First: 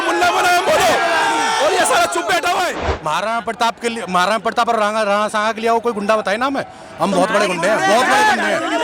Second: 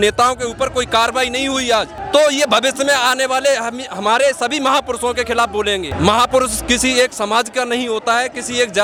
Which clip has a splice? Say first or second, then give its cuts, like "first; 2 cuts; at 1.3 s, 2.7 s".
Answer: first; 1 cut; at 2.8 s